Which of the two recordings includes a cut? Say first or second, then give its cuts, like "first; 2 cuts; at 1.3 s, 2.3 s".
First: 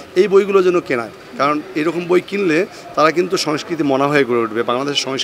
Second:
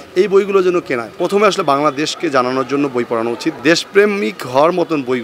second; 2 cuts; at 1.1 s, 3.6 s